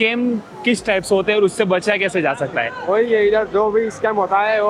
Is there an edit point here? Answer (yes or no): no